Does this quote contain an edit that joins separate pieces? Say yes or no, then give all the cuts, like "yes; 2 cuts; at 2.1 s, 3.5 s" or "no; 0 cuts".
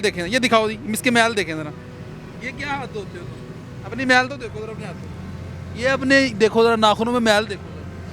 no; 0 cuts